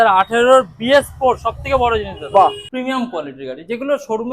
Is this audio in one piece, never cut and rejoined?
no; 1 cut; at 2.6 s

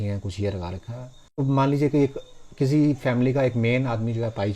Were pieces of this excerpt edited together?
yes; 1 cut; at 1.4 s

